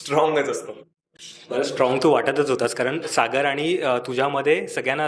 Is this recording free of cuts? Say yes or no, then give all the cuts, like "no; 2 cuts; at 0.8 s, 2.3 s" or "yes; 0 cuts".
yes; 0 cuts